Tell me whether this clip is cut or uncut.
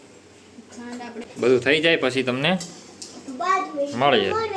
cut